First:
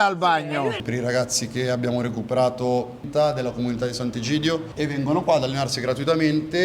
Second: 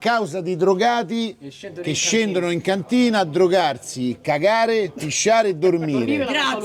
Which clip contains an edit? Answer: first; 3 cuts; at 0.8 s, 3.0 s, 4.7 s

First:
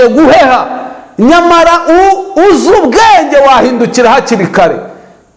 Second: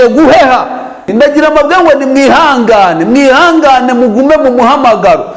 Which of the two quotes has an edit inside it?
second; 1 cut; at 1.1 s

